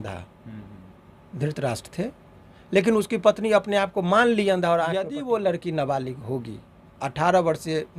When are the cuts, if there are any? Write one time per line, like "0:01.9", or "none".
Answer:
0:05.1